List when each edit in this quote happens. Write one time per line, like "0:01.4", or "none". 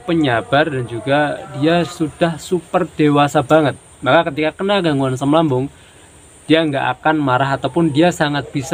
none